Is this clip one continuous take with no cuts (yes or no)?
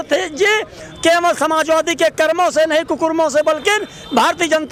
yes